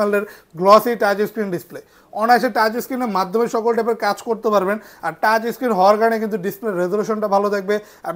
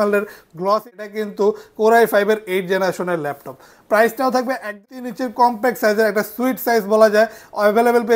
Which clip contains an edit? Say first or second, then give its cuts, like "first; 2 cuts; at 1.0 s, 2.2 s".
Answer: second; 2 cuts; at 1.0 s, 4.8 s